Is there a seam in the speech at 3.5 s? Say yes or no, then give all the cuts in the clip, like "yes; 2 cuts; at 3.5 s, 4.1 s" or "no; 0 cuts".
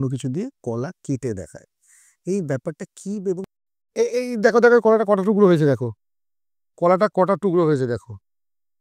yes; 1 cut; at 3.5 s